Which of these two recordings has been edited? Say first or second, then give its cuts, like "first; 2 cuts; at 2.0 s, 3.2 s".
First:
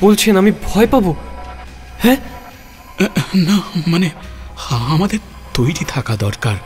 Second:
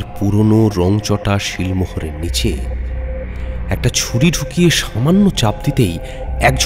first; 4 cuts; at 1.7 s, 2.8 s, 4.3 s, 5.4 s